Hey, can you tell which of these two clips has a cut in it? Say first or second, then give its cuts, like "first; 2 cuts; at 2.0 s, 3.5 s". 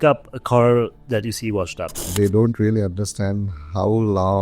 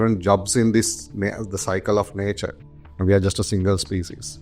first; 1 cut; at 2.1 s